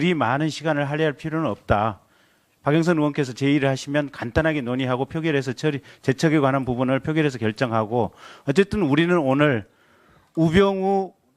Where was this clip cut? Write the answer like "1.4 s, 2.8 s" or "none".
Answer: 1.6 s